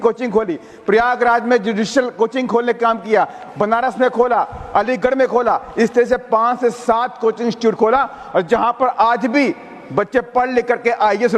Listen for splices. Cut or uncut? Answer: uncut